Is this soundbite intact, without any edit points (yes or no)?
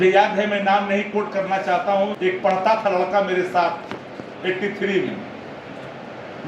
no